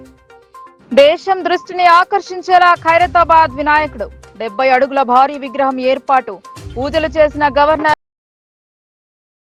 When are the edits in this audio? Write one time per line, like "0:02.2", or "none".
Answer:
none